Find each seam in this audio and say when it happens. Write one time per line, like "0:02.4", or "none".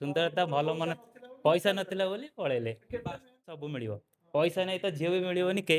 0:03.7